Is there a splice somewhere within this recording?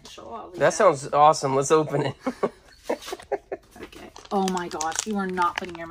yes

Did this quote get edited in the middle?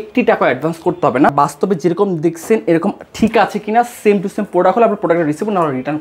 yes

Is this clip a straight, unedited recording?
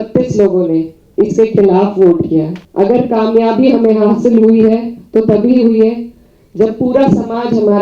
no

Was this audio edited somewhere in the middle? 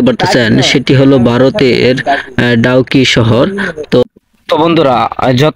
yes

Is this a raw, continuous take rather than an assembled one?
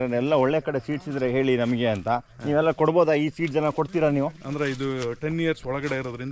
yes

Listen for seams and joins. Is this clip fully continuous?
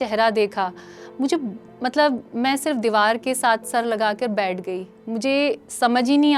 yes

